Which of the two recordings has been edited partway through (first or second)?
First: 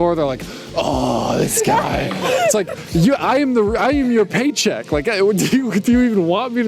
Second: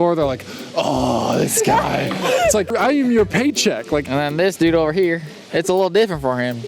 second